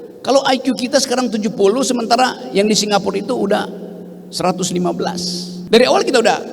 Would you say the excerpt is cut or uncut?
cut